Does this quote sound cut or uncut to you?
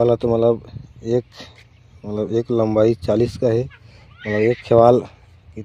uncut